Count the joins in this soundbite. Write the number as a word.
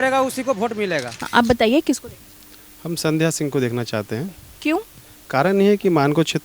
one